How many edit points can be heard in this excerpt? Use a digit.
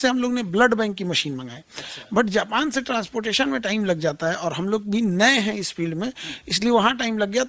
0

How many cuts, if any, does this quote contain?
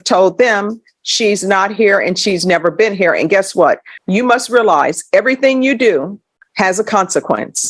1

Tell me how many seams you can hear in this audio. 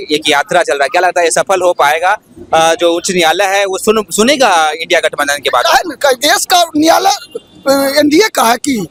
0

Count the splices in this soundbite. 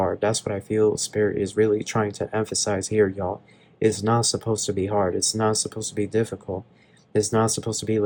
0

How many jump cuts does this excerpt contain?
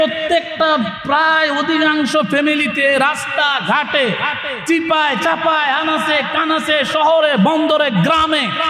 0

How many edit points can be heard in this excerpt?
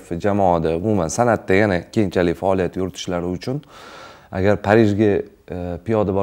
0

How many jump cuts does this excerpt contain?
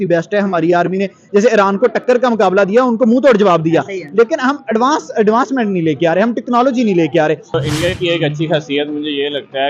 1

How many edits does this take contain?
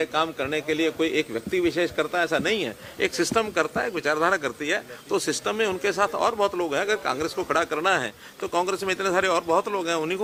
0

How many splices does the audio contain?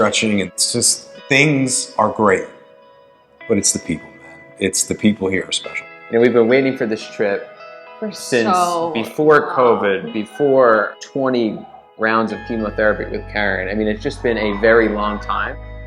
3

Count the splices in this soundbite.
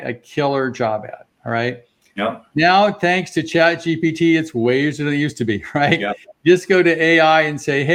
0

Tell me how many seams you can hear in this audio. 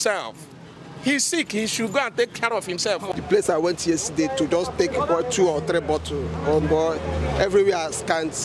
1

